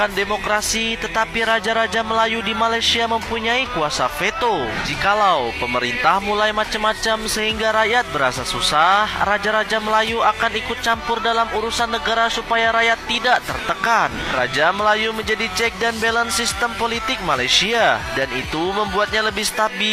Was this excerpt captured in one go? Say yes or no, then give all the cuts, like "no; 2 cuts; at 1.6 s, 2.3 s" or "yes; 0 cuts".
yes; 0 cuts